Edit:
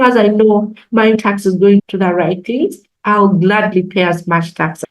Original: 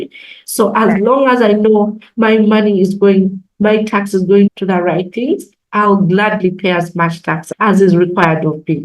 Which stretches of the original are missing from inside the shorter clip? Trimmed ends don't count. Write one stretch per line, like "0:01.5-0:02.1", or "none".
0:02.4-0:03.8